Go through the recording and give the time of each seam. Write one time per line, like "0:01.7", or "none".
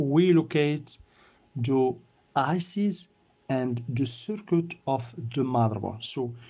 none